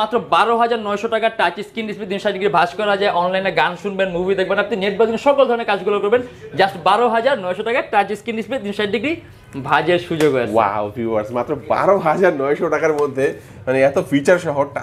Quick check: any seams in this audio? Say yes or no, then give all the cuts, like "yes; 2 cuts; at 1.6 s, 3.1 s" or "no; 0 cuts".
no; 0 cuts